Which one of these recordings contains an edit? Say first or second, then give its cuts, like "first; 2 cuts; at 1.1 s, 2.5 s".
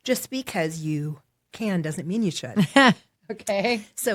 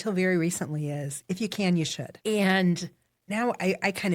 second; 1 cut; at 2.1 s